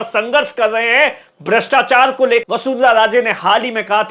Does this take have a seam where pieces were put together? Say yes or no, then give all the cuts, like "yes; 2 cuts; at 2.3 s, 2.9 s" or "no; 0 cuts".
yes; 1 cut; at 2.4 s